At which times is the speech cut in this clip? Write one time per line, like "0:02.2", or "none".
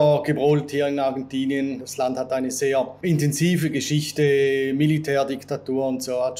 0:01.8
0:03.0